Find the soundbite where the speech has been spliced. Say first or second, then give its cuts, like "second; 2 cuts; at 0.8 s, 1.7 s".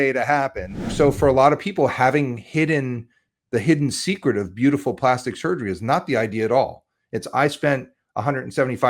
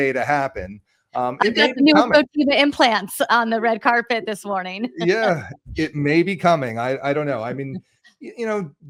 first; 1 cut; at 0.9 s